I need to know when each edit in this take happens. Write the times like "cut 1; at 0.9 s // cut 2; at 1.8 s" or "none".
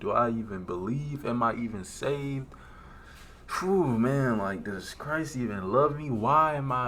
none

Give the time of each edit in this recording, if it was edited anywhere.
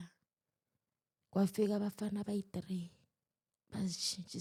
none

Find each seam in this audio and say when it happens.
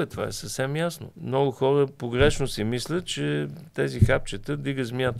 cut 1; at 1.1 s

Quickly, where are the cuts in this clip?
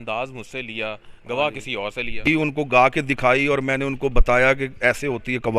cut 1; at 2.3 s

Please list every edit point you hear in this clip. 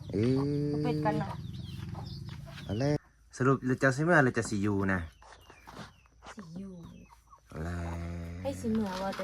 cut 1; at 3.0 s

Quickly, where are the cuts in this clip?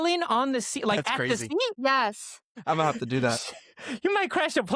cut 1; at 2.1 s

